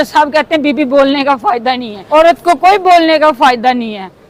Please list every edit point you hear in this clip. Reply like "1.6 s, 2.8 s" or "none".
1.9 s